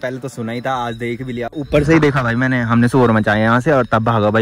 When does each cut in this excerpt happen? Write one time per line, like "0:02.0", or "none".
none